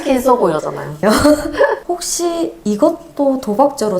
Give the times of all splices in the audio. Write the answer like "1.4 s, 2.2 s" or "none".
0.9 s

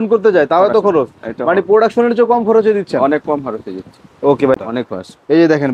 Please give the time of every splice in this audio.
4.6 s

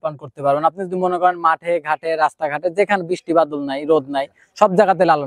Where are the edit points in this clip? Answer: none

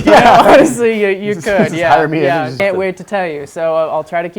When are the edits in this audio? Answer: 2.6 s

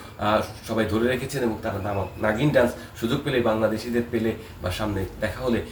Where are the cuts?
none

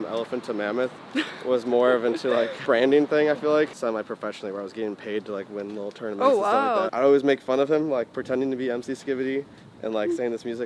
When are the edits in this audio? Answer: 3.8 s, 6.9 s

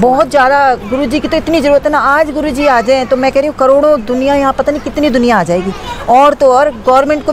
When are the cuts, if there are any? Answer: none

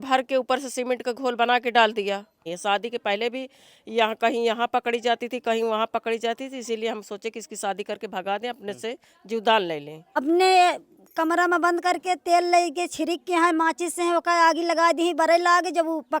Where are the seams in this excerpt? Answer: 2.5 s, 10.0 s

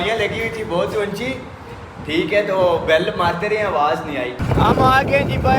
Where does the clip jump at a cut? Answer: 4.4 s

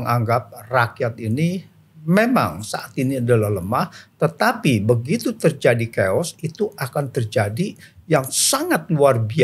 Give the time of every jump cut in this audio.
none

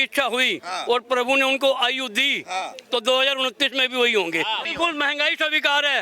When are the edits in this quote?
4.7 s

